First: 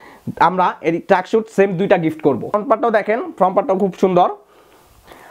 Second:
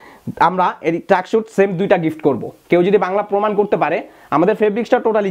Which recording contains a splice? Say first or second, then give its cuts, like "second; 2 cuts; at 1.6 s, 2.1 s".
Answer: first; 1 cut; at 2.5 s